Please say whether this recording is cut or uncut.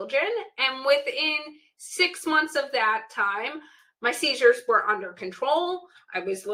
uncut